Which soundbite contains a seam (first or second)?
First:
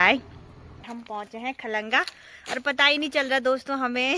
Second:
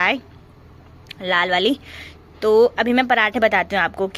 first